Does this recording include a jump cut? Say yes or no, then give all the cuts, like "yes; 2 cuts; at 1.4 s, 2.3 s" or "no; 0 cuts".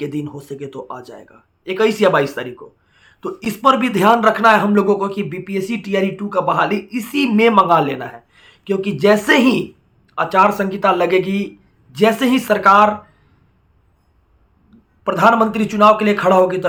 no; 0 cuts